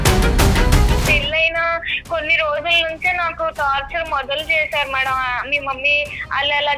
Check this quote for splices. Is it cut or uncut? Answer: cut